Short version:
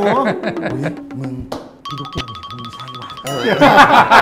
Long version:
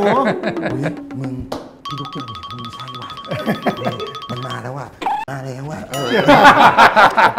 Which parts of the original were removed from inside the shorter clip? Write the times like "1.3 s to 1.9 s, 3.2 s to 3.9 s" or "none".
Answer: 3.2 s to 5.9 s